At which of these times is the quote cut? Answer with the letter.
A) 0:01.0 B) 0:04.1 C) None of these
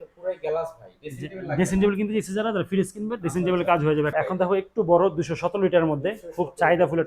B